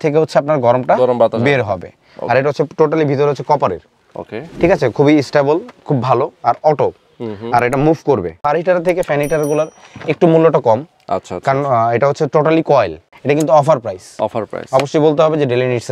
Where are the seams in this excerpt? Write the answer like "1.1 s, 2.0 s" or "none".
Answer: 8.3 s, 13.0 s